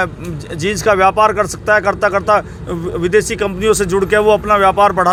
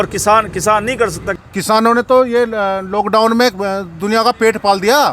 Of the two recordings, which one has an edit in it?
second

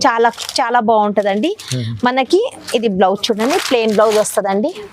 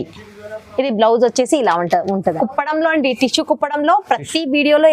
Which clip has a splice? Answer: second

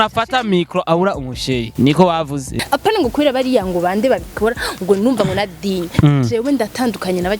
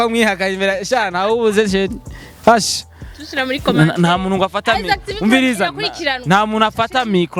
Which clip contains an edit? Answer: first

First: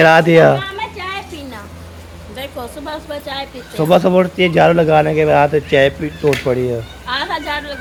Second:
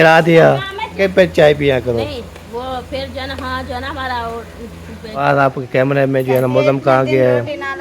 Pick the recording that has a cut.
second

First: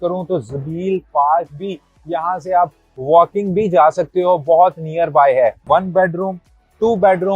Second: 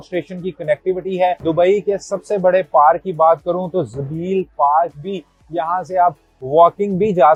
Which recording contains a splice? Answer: first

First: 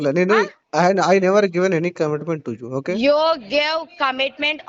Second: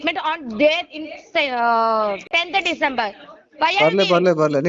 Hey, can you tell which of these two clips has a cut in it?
second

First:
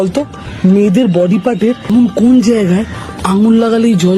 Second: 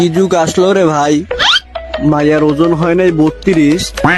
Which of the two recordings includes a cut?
first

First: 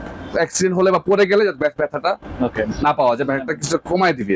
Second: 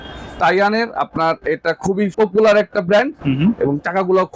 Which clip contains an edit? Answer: second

